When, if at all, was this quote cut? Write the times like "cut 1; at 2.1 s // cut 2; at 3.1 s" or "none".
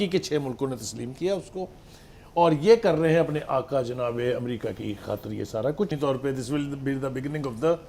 cut 1; at 5.9 s